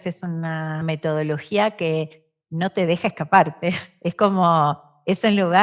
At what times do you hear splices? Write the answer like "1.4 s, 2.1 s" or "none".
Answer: 0.8 s, 3.9 s